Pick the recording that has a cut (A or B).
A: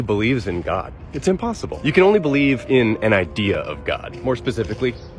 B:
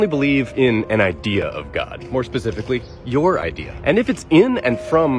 B